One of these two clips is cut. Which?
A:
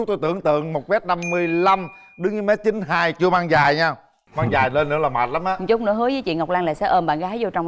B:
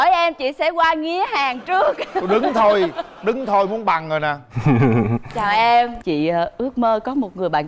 B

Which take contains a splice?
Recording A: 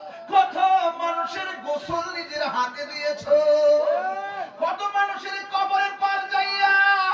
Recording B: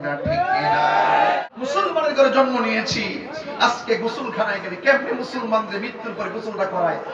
B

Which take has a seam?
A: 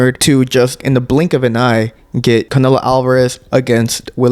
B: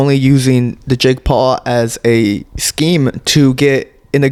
A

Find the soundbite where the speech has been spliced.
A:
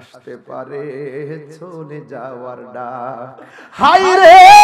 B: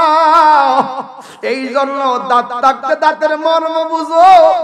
A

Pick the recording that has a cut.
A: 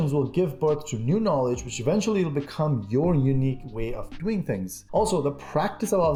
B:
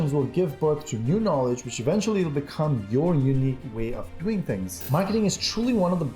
B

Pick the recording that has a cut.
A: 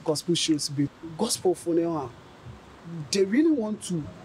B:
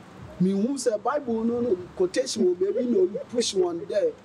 A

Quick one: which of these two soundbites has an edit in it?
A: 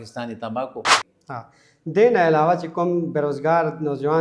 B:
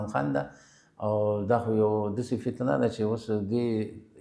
A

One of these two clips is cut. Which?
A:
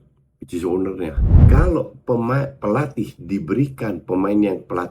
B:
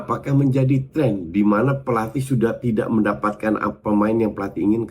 A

